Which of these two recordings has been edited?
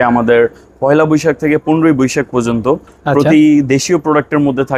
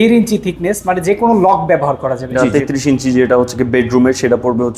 second; 1 cut; at 2.3 s

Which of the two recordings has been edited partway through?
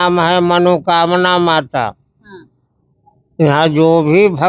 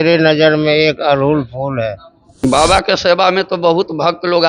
second; 1 cut; at 2.4 s

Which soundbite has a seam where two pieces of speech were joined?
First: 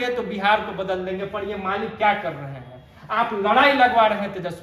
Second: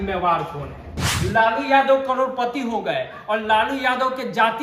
second; 1 cut; at 1.0 s

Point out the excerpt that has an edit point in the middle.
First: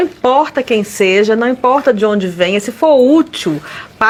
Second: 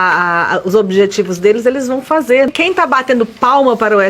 second; 1 cut; at 2.5 s

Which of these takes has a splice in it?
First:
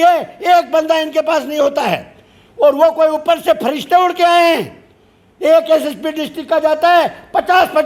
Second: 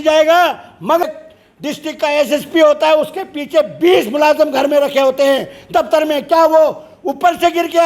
second; 1 cut; at 1.0 s

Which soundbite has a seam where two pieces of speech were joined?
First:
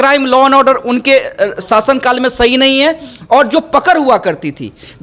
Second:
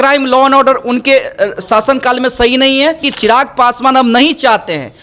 second; 1 cut; at 3.1 s

